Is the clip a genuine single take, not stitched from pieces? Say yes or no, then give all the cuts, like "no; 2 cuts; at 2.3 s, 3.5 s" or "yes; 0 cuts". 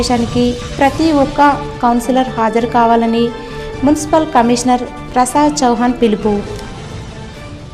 yes; 0 cuts